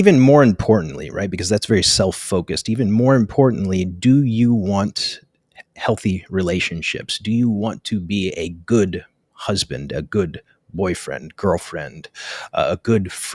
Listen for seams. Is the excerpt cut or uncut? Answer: uncut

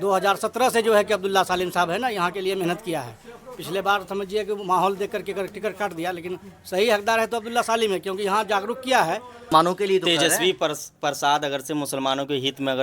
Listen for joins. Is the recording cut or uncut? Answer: cut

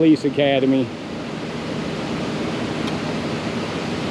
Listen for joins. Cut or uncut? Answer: uncut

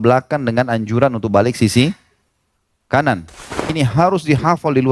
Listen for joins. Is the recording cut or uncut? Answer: cut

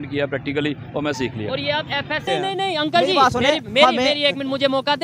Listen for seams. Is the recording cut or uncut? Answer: cut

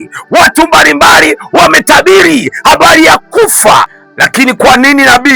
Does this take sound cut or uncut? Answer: cut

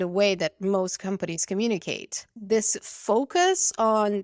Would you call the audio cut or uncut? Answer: cut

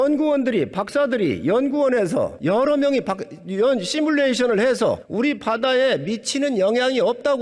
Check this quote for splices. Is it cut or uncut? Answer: cut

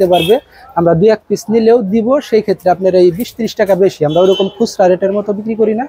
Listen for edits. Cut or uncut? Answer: uncut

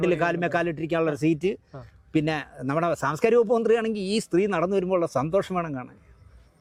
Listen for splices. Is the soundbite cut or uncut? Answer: uncut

